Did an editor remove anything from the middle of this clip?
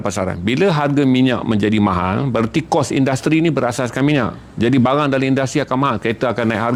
no; 0 cuts

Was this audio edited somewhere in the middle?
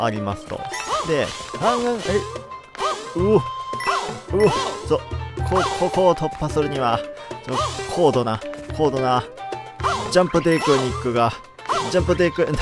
no; 0 cuts

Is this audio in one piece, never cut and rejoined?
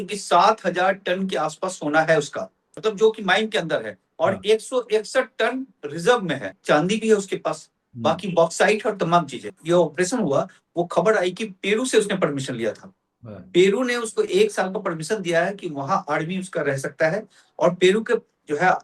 no; 3 cuts; at 2.6 s, 6.5 s, 9.6 s

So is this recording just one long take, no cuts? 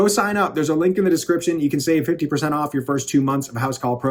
yes; 0 cuts

